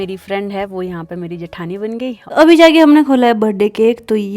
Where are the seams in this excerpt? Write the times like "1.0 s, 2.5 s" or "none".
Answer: 2.2 s